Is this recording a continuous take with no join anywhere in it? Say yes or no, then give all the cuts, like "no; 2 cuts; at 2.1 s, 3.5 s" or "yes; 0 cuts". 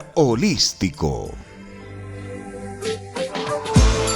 no; 1 cut; at 1.2 s